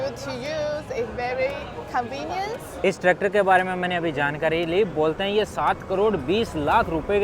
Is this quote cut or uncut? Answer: cut